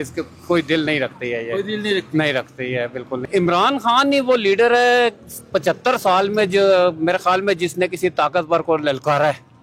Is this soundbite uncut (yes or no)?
no